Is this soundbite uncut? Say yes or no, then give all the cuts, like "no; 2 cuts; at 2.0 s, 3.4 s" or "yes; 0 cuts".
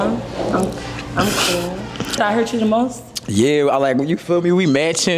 no; 1 cut; at 2.2 s